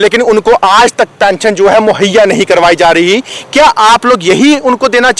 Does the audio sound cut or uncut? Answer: uncut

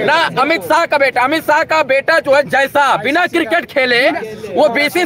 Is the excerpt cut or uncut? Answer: uncut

